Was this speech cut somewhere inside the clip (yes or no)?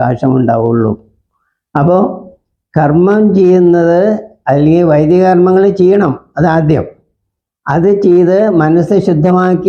no